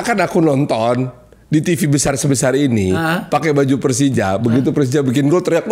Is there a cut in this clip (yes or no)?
no